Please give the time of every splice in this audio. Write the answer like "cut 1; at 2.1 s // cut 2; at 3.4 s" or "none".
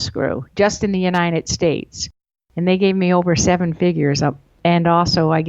cut 1; at 4.6 s